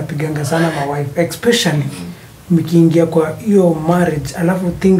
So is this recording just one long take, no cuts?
yes; 0 cuts

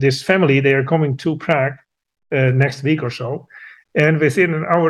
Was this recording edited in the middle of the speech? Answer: no; 0 cuts

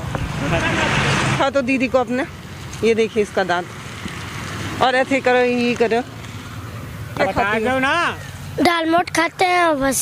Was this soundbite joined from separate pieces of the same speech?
yes; 2 cuts; at 1.4 s, 7.2 s

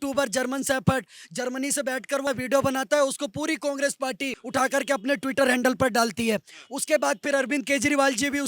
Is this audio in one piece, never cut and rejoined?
no; 1 cut; at 4.4 s

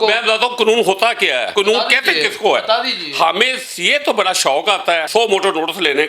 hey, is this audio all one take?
no; 2 cuts; at 1.5 s, 5.1 s

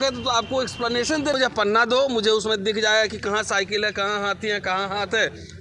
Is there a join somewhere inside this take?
yes; 1 cut; at 1.3 s

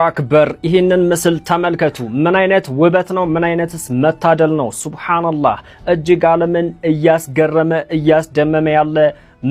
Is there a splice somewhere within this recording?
no; 0 cuts

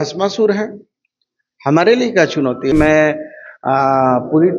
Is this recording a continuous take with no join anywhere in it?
no; 1 cut; at 2.7 s

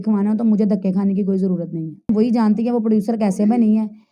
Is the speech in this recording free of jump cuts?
no; 1 cut; at 2.1 s

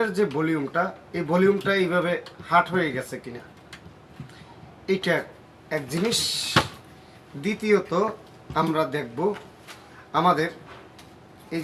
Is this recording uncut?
yes; 0 cuts

